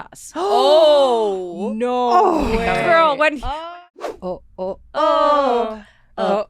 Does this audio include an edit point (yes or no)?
yes